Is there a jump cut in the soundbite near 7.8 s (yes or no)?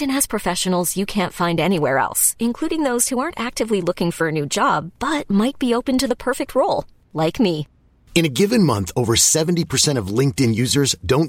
no